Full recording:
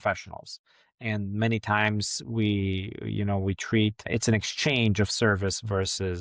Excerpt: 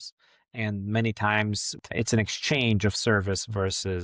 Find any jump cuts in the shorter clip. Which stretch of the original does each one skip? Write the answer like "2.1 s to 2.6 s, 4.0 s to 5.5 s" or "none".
2.3 s to 4.0 s

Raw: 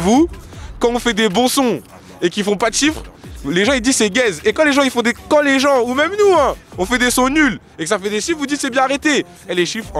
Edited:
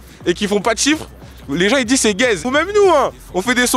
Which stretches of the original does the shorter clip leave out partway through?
4.4 s to 5.9 s

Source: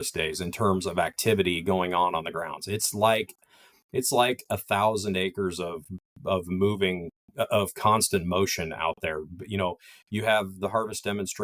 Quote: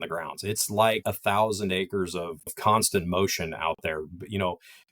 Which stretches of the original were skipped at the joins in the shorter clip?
3.2 s to 4.5 s, 6.0 s to 7.7 s

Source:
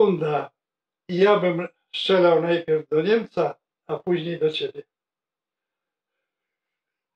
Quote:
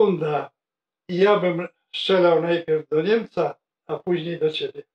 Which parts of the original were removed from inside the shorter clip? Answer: none

